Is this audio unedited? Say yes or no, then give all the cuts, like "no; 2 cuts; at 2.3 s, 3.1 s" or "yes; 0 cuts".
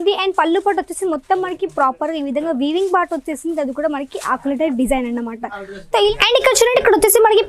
no; 1 cut; at 6.1 s